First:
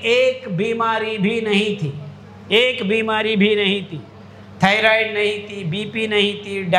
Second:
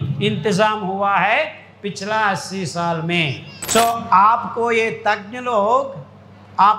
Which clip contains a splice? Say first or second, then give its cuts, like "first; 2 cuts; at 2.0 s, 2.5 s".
second; 1 cut; at 3.5 s